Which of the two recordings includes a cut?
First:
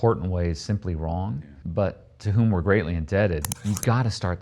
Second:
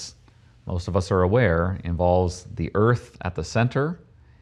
first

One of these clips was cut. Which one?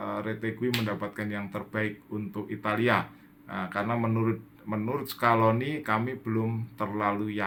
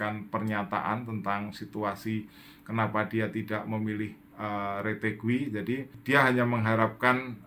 second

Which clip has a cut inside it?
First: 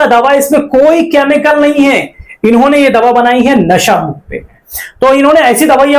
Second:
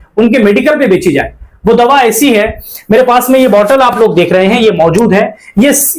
first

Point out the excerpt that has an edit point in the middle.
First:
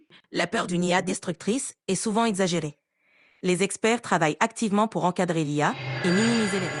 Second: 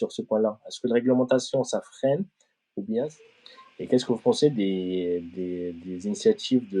second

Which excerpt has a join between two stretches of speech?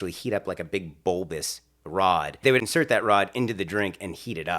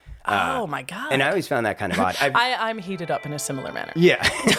first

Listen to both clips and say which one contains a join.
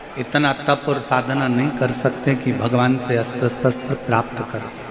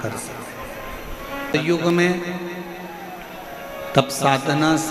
second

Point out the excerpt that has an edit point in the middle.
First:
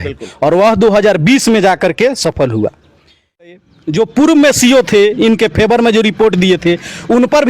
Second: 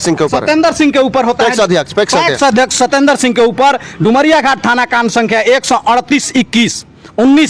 first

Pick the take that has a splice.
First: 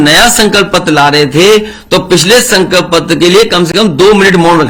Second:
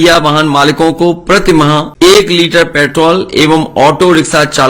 second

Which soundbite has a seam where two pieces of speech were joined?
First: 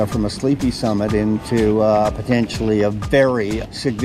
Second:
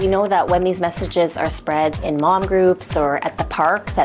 second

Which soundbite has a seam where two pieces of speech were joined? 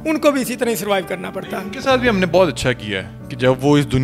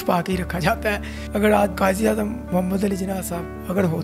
second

